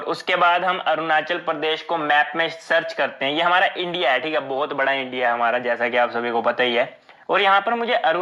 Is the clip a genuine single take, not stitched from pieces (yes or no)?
yes